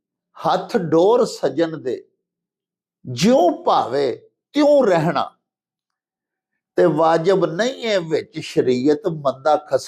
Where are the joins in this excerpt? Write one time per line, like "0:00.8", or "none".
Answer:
none